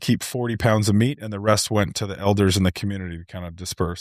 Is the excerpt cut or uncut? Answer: uncut